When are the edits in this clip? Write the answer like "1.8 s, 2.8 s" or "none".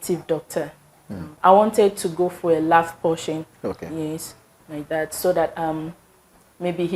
1.3 s